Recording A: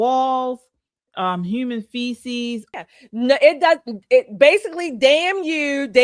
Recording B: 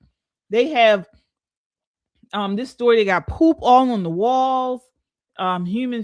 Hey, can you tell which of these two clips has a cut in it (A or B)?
A